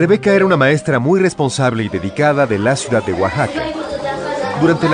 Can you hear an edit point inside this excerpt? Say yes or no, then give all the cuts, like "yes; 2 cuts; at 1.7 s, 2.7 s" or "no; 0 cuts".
no; 0 cuts